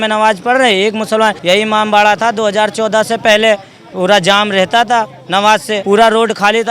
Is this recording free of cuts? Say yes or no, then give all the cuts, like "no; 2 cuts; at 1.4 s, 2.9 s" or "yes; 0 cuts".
no; 2 cuts; at 1.4 s, 5.7 s